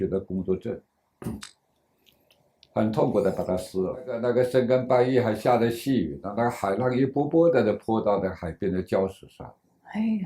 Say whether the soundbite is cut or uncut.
cut